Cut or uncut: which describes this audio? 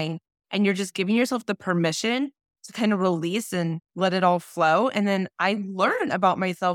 cut